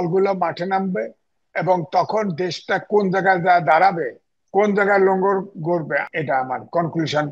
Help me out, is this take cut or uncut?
cut